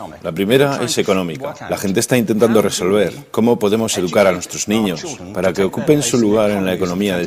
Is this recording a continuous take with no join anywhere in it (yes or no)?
yes